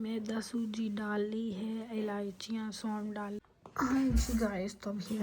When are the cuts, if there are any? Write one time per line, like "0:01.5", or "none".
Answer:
0:03.4